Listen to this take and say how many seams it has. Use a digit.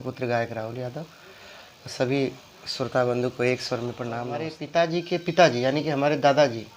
1